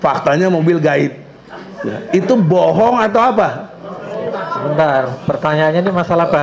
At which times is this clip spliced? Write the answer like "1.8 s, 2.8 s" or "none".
none